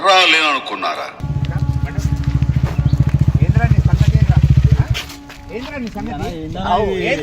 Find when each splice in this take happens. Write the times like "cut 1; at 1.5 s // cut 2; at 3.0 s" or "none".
cut 1; at 1.2 s